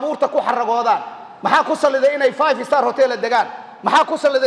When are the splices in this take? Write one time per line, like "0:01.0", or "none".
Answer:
none